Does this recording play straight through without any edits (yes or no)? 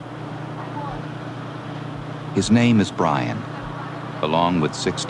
yes